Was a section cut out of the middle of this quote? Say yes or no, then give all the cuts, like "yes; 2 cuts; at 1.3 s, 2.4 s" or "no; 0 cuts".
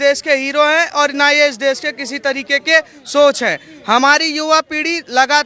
no; 0 cuts